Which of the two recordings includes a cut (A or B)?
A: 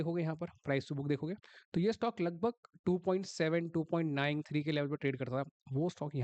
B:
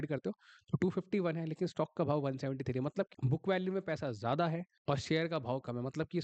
B